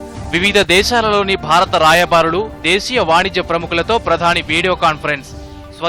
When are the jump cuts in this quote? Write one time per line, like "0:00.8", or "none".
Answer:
none